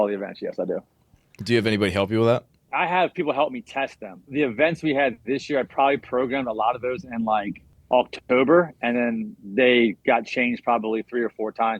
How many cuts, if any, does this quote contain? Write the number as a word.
two